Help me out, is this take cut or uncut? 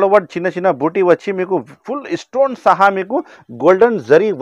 uncut